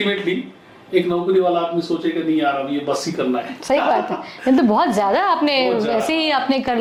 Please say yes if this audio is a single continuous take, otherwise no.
yes